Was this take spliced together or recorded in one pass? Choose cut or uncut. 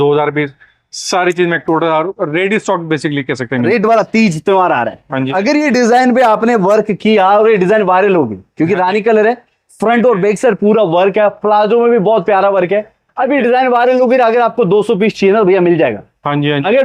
cut